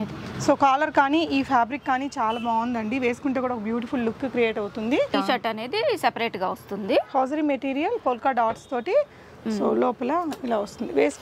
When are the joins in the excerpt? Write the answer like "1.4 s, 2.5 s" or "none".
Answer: 5.1 s